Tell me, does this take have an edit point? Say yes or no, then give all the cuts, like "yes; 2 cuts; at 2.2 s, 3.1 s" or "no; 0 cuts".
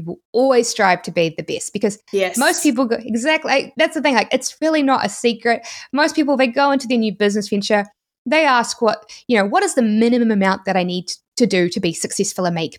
no; 0 cuts